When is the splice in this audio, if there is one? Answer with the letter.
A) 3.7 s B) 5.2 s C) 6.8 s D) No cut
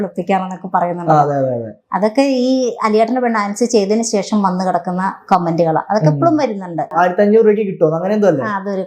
C